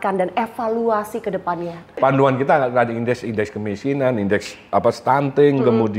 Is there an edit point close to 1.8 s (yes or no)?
yes